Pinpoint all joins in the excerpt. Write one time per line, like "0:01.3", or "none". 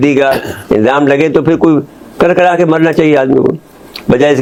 none